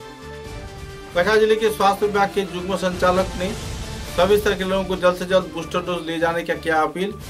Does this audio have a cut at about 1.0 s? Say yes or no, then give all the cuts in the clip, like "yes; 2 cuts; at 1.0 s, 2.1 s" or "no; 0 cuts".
yes; 1 cut; at 1.0 s